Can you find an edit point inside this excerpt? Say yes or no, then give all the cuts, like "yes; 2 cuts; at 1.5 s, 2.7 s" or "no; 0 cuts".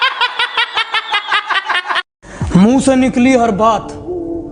yes; 1 cut; at 2.3 s